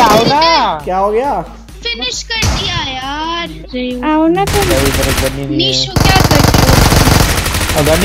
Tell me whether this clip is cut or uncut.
cut